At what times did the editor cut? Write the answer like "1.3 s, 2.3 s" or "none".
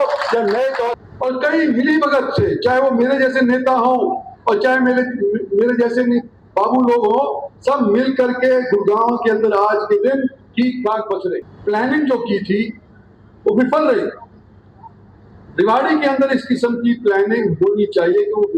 0.9 s, 11.5 s